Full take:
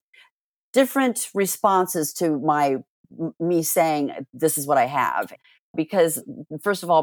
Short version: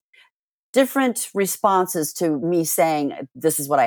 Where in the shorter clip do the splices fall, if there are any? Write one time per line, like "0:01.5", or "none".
0:02.4